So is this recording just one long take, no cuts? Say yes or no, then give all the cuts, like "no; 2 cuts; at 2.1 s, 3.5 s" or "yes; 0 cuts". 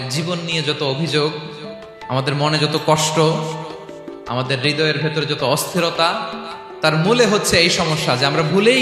yes; 0 cuts